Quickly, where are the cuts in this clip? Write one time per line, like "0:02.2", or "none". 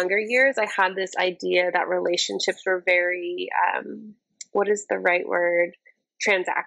none